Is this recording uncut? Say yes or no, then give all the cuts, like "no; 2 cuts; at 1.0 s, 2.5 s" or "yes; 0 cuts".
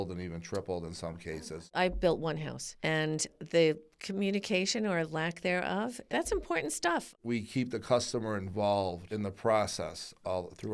no; 3 cuts; at 1.6 s, 7.2 s, 9.0 s